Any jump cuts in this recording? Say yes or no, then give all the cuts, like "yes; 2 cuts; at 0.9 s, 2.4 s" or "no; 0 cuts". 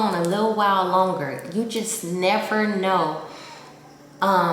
no; 0 cuts